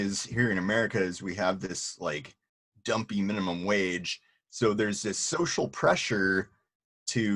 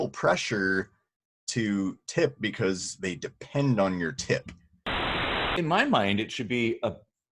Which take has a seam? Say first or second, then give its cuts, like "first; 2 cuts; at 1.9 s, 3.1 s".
second; 1 cut; at 5.2 s